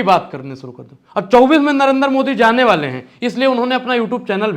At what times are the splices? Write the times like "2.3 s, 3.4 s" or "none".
none